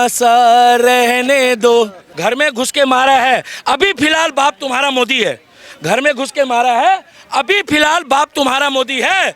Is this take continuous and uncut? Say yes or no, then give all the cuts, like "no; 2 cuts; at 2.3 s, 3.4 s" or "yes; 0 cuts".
no; 1 cut; at 2.0 s